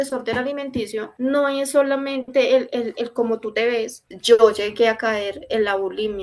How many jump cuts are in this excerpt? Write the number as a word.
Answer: one